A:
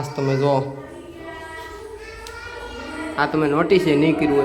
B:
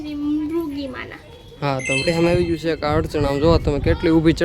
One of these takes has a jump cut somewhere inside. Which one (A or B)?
B